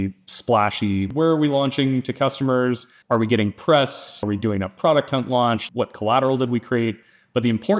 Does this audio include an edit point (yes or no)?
yes